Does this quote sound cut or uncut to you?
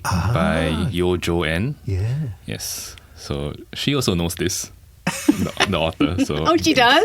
cut